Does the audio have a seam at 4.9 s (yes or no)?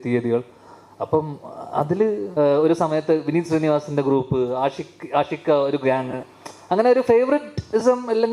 no